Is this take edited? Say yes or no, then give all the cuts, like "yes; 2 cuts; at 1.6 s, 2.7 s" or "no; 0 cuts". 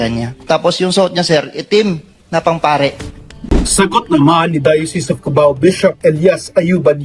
no; 0 cuts